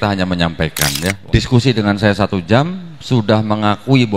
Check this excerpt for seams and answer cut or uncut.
cut